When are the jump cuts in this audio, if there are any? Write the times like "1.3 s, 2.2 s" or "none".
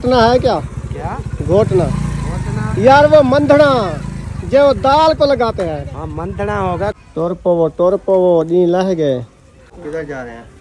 7.0 s, 9.7 s